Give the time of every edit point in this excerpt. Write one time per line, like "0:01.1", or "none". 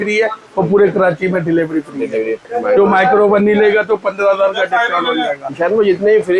0:02.5
0:05.5